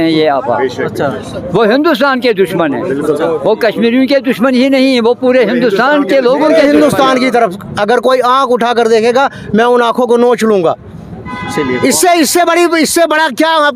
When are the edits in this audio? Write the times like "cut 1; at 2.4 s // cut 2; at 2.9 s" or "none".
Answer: cut 1; at 6.5 s